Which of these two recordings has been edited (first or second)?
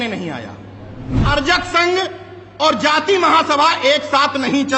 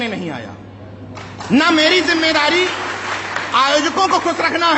first